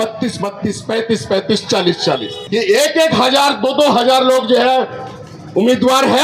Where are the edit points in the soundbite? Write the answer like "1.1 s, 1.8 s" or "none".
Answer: 2.3 s